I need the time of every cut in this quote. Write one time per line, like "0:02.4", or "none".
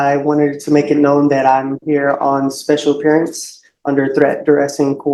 none